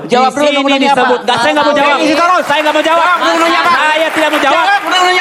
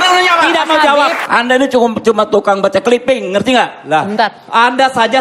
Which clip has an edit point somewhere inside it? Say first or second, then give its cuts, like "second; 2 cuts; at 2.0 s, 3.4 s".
second; 1 cut; at 1.2 s